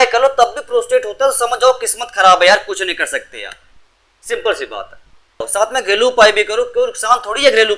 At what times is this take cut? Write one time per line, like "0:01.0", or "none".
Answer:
0:05.5

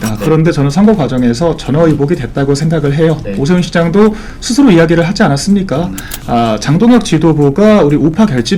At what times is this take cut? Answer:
none

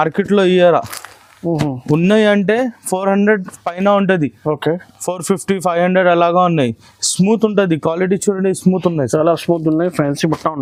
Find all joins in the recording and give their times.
none

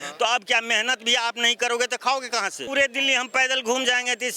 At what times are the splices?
0:02.6

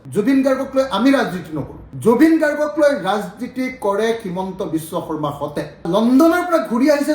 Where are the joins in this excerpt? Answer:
0:05.8

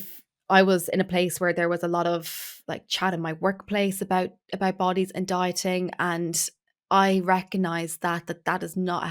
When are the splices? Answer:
none

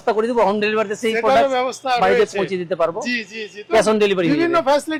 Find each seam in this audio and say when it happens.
none

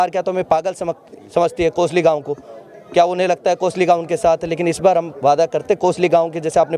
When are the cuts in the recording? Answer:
none

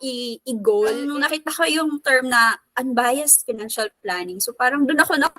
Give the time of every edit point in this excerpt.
0:01.1

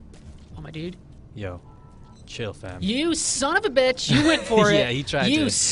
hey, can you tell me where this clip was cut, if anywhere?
none

